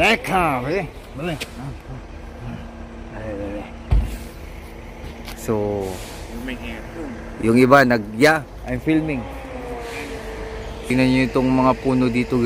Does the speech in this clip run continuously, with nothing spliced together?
yes; 0 cuts

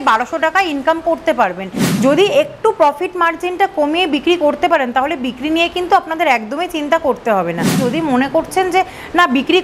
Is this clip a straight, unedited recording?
no; 2 cuts; at 1.8 s, 7.8 s

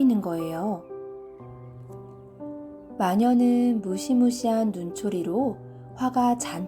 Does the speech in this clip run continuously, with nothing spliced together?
yes; 0 cuts

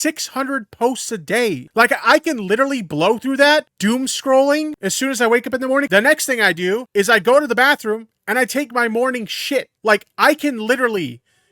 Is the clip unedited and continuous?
no; 6 cuts; at 1.6 s, 3.7 s, 4.8 s, 5.9 s, 6.9 s, 9.7 s

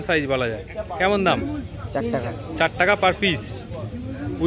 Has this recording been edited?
no; 0 cuts

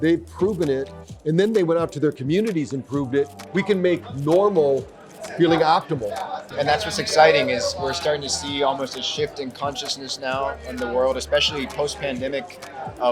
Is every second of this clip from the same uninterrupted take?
no; 2 cuts; at 3.5 s, 6.5 s

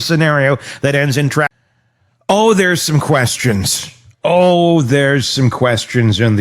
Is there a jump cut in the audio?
yes; 1 cut; at 1.5 s

